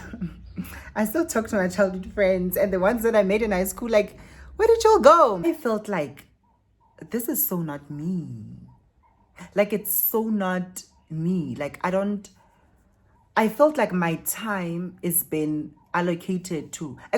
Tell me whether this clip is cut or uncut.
cut